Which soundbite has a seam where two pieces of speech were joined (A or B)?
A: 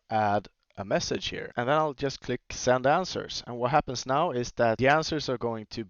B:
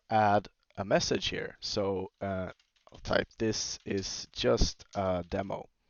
A